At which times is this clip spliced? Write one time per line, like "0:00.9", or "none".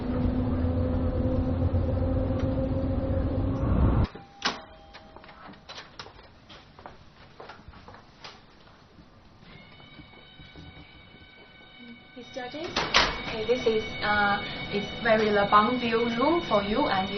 none